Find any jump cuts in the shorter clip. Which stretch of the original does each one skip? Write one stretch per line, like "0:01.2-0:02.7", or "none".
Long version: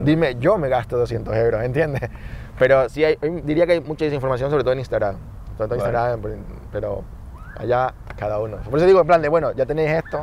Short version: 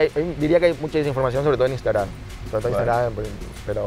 none